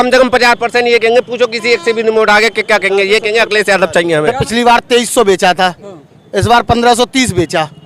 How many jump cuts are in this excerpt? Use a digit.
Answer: 1